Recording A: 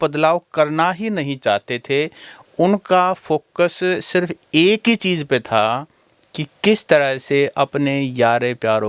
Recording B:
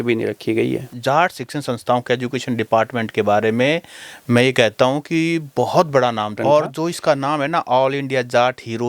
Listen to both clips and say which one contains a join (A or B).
B